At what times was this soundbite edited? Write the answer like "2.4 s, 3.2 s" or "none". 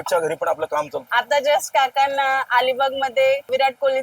1.0 s